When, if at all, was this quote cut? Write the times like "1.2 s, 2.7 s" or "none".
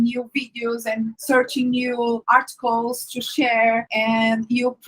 1.2 s, 2.2 s, 3.9 s